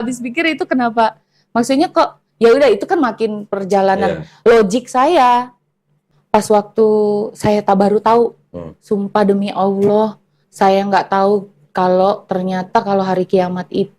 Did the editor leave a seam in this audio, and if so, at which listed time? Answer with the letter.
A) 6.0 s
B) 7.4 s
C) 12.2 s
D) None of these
A